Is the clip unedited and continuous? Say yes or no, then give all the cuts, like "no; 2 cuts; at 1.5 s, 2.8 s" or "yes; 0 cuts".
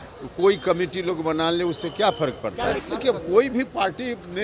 no; 1 cut; at 2.8 s